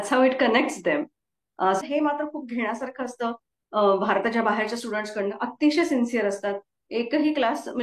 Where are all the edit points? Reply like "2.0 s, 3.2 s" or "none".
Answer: 1.8 s